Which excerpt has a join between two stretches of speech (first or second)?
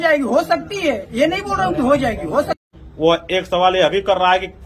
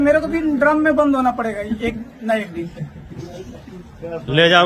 first